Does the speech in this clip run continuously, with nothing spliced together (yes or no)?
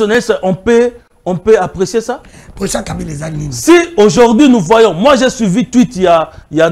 yes